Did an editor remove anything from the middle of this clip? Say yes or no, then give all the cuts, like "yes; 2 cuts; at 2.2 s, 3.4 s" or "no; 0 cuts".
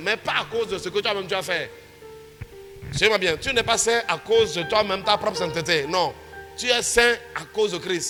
no; 0 cuts